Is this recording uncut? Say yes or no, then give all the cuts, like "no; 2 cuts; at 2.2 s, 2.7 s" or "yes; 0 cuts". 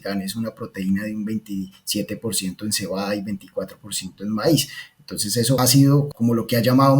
no; 1 cut; at 6.0 s